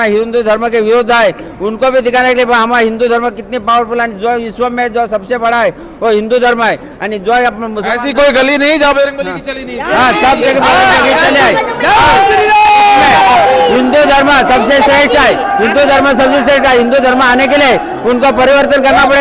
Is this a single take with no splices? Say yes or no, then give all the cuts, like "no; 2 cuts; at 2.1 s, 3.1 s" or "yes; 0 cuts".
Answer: yes; 0 cuts